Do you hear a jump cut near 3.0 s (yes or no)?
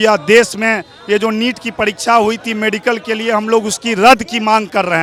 no